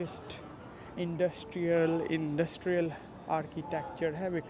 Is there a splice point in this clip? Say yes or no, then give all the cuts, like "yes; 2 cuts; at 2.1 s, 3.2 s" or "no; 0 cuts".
no; 0 cuts